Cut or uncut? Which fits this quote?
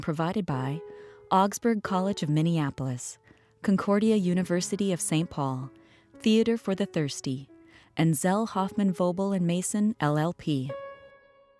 cut